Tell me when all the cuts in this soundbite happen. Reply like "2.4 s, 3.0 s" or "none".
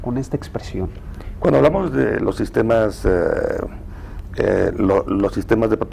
1.6 s